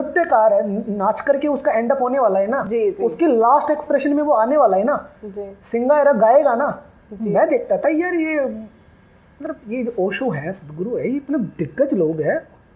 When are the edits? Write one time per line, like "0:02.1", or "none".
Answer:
none